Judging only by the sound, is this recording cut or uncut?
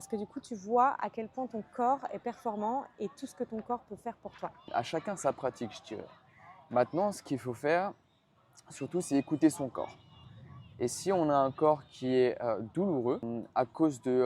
cut